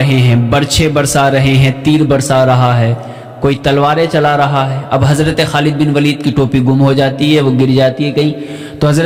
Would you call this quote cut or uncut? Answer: uncut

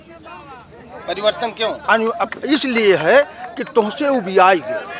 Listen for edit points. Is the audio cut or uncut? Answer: uncut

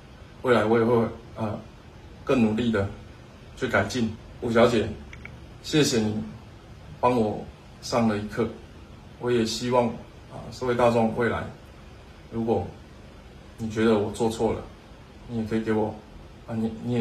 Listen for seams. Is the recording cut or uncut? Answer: cut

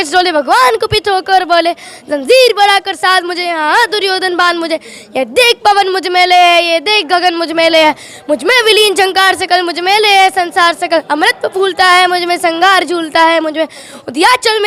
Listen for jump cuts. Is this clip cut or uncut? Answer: uncut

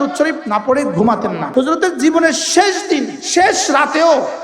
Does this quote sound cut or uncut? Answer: cut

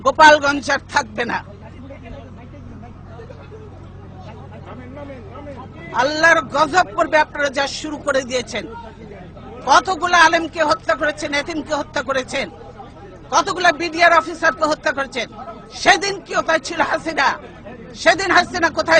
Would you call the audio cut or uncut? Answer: uncut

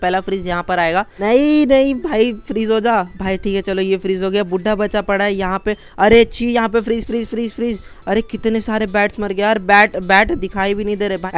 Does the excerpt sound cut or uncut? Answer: uncut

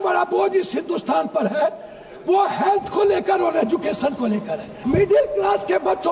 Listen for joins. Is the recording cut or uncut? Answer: cut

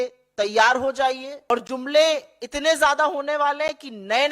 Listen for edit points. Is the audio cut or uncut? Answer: cut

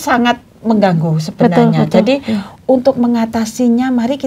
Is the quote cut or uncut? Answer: uncut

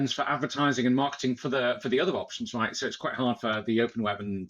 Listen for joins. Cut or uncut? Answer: uncut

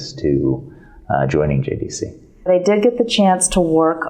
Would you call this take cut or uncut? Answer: cut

